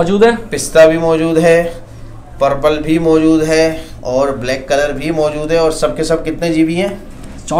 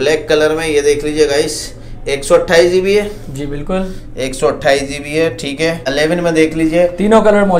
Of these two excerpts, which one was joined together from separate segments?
second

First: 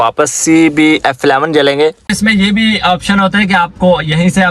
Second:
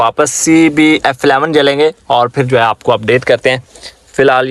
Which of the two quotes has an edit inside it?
first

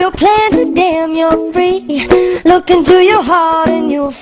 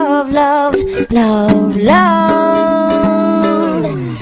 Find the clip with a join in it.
first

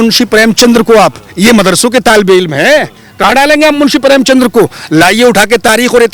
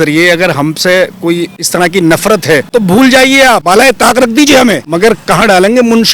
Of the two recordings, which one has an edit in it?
second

